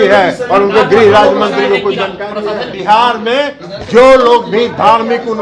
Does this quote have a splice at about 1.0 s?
no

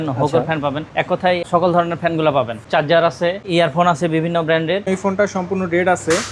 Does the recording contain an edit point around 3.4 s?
yes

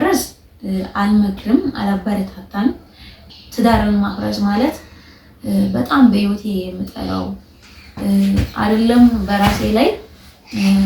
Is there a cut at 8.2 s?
no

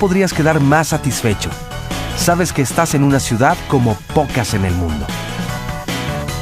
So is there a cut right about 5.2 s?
yes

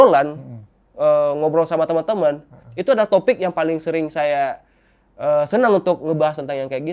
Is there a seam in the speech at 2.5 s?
no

